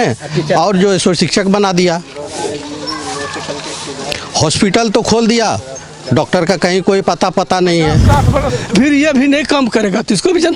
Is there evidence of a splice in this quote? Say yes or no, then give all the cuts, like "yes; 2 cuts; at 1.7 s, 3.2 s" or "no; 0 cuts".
yes; 1 cut; at 8.5 s